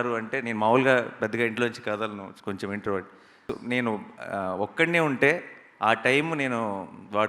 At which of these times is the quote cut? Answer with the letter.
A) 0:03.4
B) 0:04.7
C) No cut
A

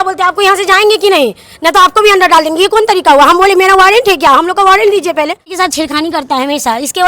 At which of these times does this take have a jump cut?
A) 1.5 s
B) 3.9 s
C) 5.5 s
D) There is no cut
C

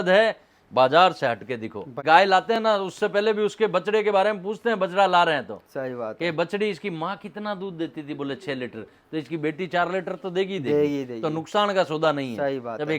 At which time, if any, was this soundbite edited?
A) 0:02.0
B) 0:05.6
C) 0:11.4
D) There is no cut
A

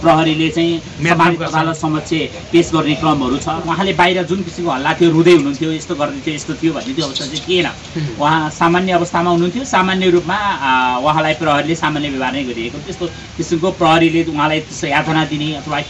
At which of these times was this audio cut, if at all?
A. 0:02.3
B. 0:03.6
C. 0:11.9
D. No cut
B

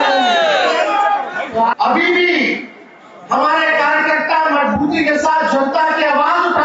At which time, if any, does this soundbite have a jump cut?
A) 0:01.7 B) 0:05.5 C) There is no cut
A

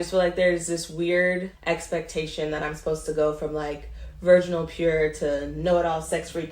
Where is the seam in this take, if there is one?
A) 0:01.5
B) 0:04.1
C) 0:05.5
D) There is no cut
A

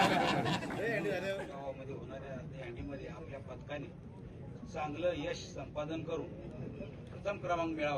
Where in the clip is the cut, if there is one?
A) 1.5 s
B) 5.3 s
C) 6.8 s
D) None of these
A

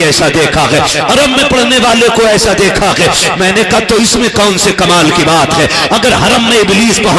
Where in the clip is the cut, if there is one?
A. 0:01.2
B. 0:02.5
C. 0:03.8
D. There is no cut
D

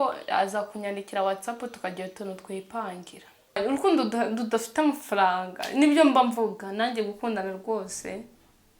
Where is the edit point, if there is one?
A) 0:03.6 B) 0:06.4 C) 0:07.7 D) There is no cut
A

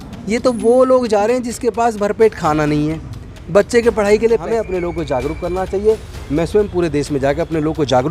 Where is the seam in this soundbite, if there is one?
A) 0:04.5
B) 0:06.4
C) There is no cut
A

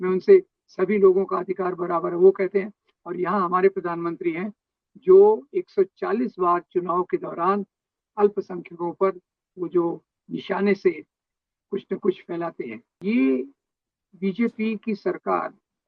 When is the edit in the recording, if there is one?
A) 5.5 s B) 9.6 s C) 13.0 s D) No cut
C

